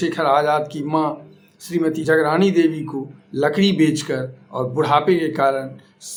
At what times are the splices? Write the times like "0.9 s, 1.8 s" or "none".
none